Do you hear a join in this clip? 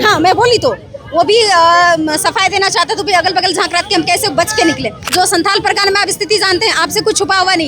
yes; 1 cut; at 5.0 s

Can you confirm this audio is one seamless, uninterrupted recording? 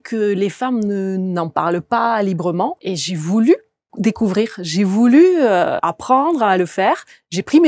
no; 3 cuts; at 2.8 s, 3.9 s, 5.8 s

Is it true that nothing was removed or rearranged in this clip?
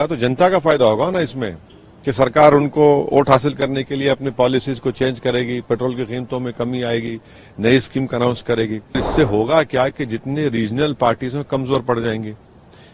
no; 1 cut; at 9.0 s

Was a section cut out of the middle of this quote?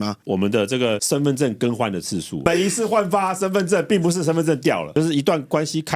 yes; 2 cuts; at 2.4 s, 4.9 s

